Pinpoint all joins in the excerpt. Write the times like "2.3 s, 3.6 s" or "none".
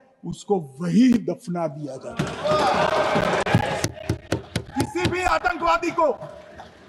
none